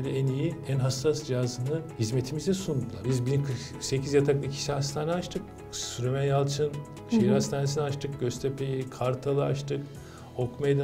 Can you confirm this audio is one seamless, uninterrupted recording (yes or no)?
no